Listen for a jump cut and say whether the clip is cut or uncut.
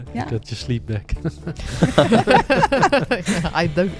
uncut